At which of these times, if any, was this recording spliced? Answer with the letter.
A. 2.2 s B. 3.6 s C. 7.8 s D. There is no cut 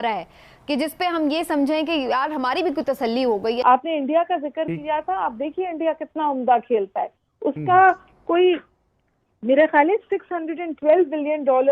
B